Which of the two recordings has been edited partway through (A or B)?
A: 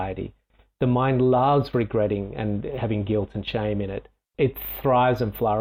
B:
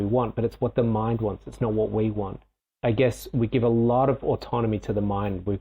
B